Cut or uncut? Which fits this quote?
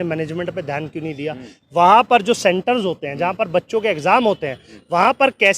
uncut